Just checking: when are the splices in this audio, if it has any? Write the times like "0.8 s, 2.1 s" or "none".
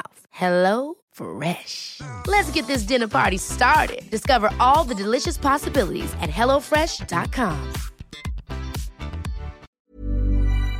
9.8 s